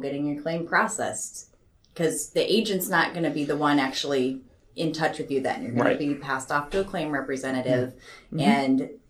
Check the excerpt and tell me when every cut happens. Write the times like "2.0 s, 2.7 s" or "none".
none